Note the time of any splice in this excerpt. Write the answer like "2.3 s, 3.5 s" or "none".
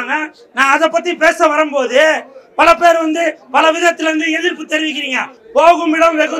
5.3 s